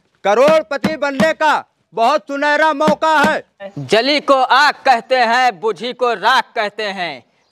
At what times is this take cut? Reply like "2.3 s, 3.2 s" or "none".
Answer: 3.7 s